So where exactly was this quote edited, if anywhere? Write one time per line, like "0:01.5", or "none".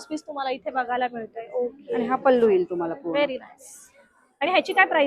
none